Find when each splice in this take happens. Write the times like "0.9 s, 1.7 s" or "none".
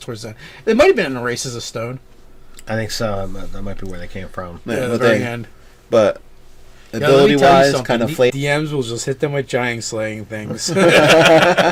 none